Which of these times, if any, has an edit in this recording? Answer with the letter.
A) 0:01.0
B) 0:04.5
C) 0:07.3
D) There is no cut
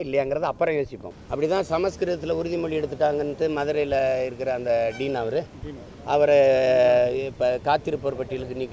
A